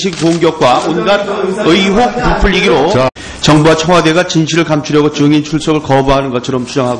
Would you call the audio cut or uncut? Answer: uncut